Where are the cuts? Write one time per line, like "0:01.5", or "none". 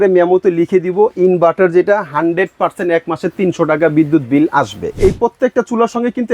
0:05.0